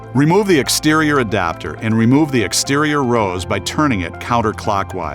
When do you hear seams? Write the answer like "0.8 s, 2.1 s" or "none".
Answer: 1.7 s